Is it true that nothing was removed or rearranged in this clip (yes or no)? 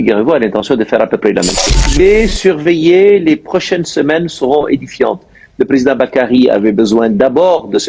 no